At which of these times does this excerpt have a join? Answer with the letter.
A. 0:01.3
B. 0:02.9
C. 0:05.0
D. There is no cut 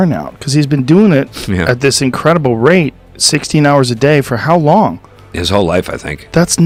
D